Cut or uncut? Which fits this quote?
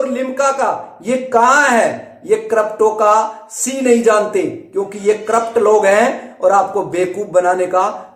uncut